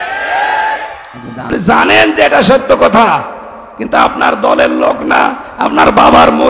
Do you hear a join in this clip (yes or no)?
yes